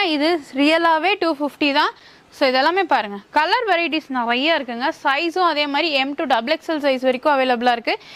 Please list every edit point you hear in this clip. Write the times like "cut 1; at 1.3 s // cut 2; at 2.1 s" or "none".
none